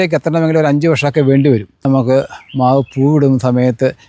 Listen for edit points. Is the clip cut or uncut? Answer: cut